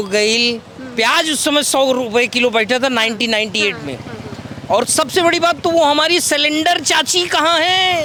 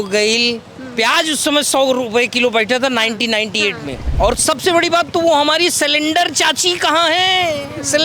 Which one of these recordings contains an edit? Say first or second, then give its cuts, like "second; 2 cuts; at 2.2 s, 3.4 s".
second; 1 cut; at 4.0 s